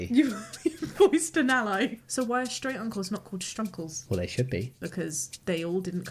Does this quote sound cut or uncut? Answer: cut